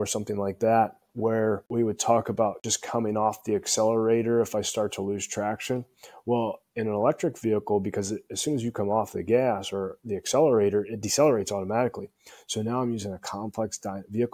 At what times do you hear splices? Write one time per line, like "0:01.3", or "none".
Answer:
0:01.6
0:02.7